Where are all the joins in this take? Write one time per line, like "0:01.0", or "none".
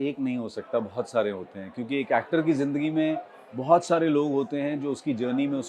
none